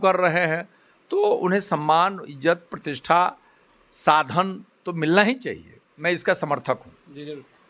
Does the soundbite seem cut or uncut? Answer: uncut